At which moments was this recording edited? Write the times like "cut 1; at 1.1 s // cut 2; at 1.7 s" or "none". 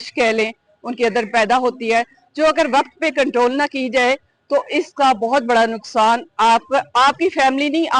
none